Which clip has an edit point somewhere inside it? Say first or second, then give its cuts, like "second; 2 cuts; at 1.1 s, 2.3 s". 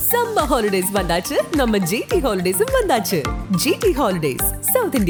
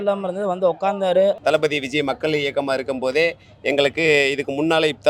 second; 1 cut; at 1.4 s